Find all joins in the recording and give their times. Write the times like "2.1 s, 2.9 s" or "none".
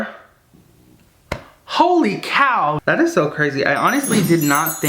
2.8 s